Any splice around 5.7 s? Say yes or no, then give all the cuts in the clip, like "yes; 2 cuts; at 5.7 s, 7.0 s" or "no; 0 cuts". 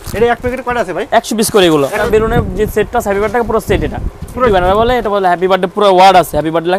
no; 2 cuts; at 2.1 s, 4.5 s